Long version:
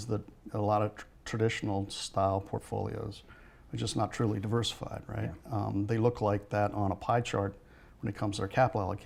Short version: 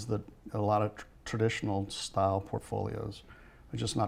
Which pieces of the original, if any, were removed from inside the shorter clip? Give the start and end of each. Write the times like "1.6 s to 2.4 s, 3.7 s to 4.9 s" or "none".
none